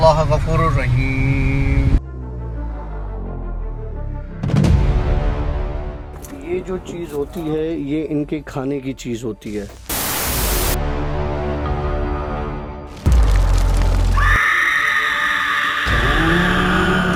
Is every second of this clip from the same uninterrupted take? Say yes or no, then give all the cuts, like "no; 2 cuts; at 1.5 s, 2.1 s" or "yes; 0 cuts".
yes; 0 cuts